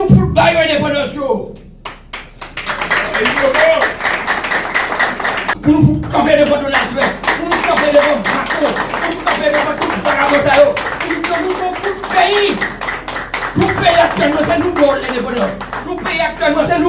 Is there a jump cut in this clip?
yes; 1 cut; at 5.5 s

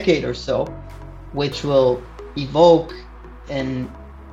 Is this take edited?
no; 0 cuts

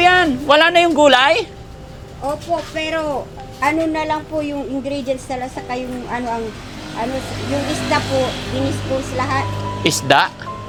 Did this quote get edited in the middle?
no; 0 cuts

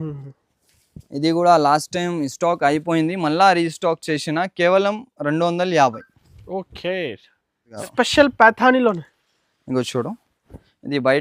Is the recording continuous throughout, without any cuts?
no; 1 cut; at 7.7 s

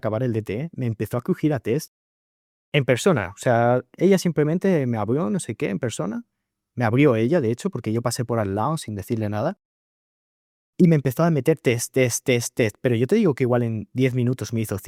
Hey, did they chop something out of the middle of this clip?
no; 0 cuts

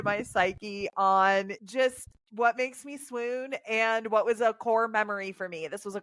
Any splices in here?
no; 0 cuts

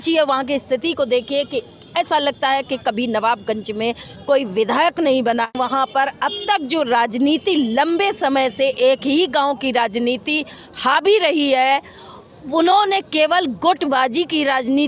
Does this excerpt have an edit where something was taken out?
yes; 1 cut; at 5.5 s

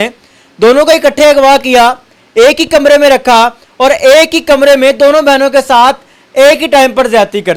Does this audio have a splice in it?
no; 0 cuts

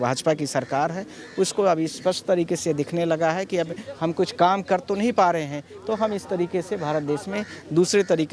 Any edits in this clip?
no; 0 cuts

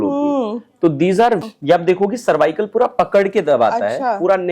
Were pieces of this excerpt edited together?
yes; 1 cut; at 1.4 s

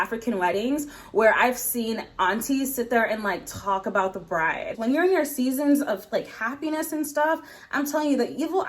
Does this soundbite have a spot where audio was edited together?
yes; 1 cut; at 4.8 s

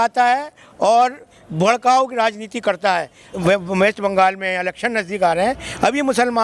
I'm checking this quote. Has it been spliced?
yes; 1 cut; at 3.4 s

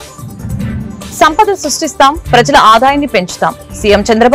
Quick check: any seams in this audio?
yes; 1 cut; at 1.1 s

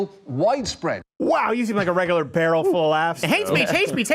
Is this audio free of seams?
no; 1 cut; at 3.2 s

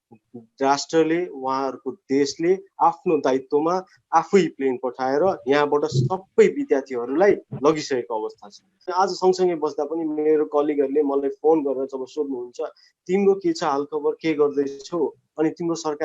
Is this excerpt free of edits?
no; 1 cut; at 8.9 s

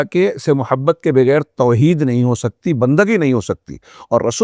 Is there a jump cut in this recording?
no; 0 cuts

